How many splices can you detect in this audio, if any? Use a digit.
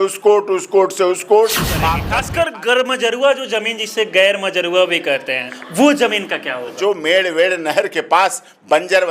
3